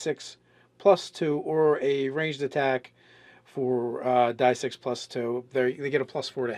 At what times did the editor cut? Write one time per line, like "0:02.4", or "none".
0:02.9